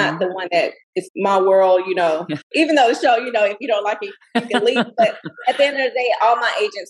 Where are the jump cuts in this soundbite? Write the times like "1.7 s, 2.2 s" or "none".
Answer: 0.9 s, 2.5 s

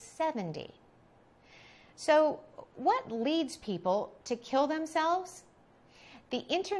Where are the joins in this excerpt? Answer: 2.5 s

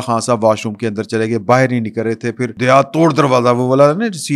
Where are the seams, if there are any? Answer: 2.5 s

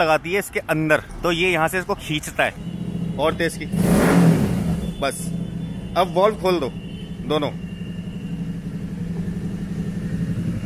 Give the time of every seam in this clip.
1.1 s, 2.7 s

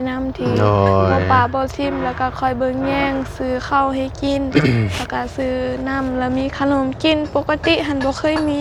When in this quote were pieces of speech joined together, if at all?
none

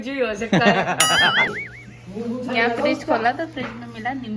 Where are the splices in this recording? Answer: 1.5 s

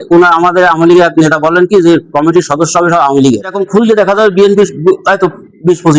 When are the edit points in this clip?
3.6 s

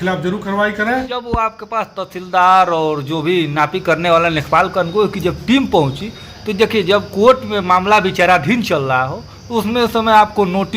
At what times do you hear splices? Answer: 1.1 s

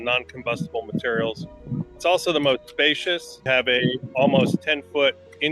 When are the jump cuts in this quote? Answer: 1.5 s, 3.3 s

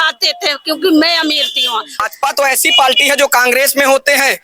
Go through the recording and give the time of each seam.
2.1 s

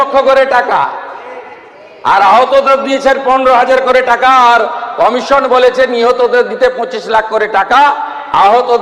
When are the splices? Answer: none

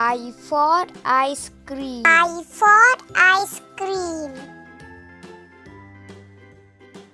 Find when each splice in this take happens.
4.4 s

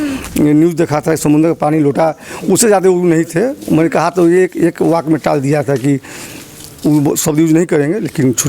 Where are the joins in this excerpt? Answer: none

